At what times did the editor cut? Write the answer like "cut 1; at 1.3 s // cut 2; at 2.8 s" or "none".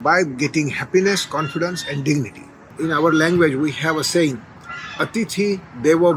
cut 1; at 2.7 s

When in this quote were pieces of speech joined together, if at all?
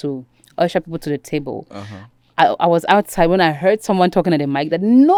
none

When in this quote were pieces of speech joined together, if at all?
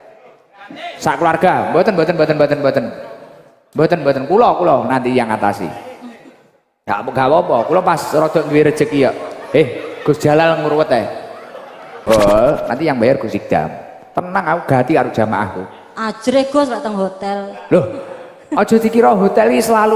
cut 1; at 12.0 s

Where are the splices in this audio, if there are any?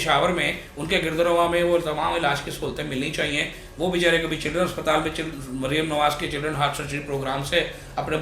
none

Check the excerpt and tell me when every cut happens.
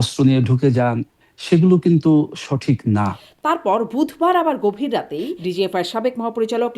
cut 1; at 3.3 s // cut 2; at 5.4 s

